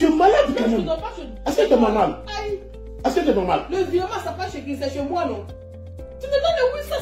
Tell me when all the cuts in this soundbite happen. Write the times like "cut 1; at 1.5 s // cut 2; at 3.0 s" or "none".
none